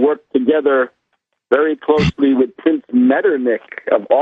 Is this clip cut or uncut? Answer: uncut